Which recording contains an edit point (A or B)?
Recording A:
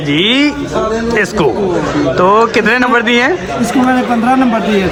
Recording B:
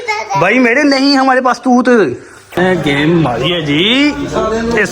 B